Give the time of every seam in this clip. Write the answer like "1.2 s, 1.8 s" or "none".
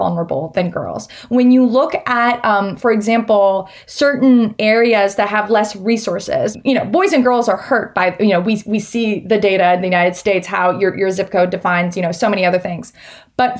6.5 s